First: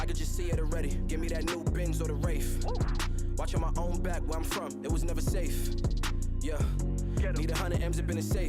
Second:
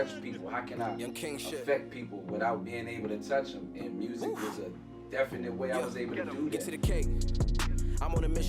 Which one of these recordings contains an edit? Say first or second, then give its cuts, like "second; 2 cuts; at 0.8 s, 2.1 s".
second; 1 cut; at 6.7 s